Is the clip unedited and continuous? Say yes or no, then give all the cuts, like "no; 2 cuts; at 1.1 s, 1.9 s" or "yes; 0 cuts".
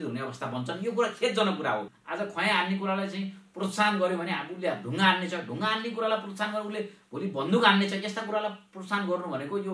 no; 1 cut; at 1.9 s